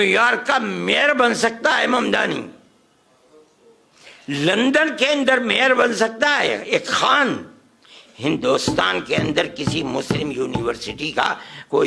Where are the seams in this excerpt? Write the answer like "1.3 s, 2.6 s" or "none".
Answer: none